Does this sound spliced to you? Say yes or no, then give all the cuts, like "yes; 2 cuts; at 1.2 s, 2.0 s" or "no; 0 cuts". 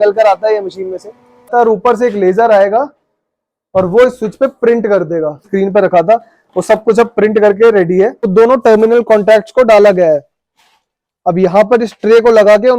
yes; 3 cuts; at 1.5 s, 5.5 s, 8.3 s